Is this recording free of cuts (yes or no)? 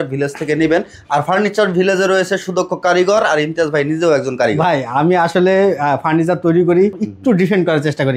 no